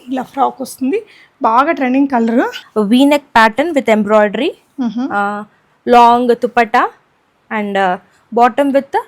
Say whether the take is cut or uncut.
cut